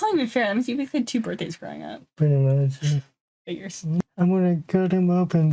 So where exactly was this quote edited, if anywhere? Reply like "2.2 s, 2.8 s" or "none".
4.0 s